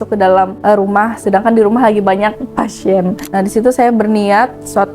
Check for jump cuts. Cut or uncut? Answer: cut